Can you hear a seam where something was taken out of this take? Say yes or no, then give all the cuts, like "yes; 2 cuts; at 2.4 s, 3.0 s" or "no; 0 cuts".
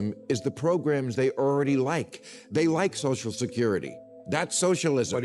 no; 0 cuts